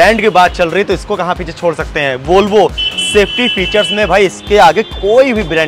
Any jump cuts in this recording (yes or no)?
no